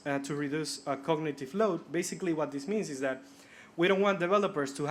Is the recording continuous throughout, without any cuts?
yes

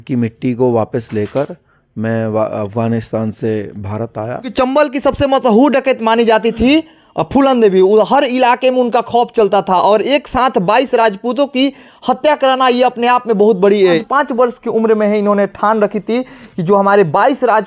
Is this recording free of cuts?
no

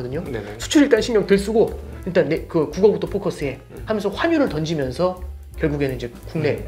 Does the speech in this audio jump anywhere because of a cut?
no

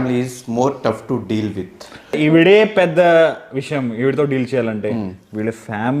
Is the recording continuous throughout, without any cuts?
no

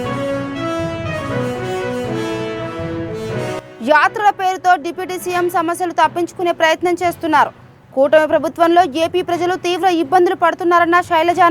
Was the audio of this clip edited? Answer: yes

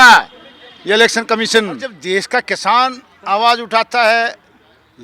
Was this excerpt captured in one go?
no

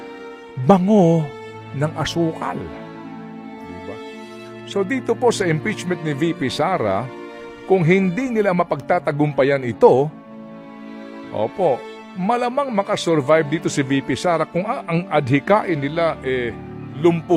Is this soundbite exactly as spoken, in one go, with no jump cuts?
yes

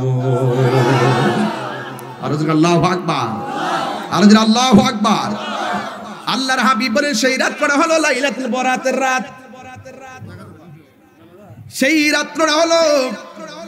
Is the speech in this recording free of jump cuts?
yes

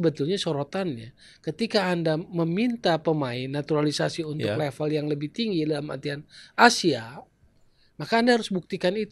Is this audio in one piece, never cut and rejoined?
yes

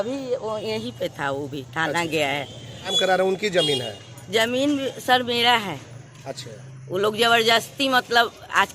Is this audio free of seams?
no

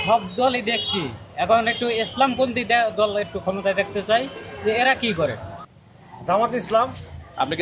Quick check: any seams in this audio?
yes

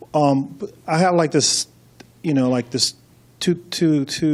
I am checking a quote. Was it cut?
no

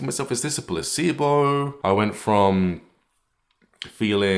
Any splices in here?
yes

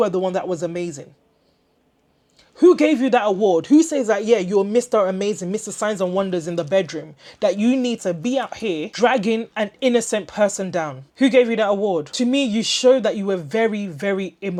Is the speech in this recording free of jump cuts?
yes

